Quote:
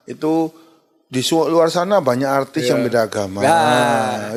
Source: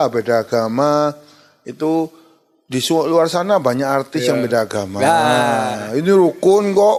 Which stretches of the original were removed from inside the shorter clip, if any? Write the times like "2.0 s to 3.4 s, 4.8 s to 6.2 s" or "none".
none

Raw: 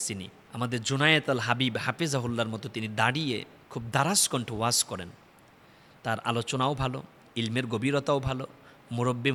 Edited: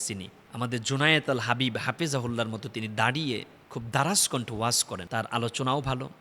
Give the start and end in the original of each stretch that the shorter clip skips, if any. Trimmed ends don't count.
4.9 s to 5.9 s

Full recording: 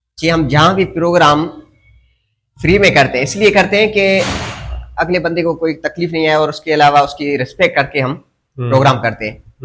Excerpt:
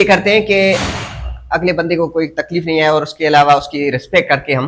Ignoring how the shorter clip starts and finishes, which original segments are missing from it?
none

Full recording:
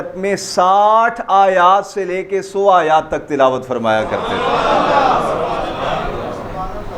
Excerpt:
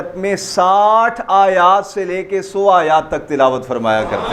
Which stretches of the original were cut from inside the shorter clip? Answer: none

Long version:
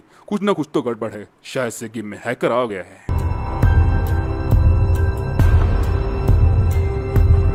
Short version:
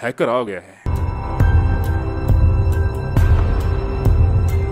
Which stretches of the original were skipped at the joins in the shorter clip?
none

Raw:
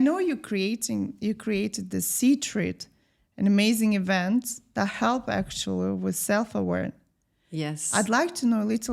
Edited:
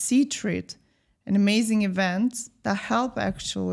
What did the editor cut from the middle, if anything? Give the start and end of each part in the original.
none

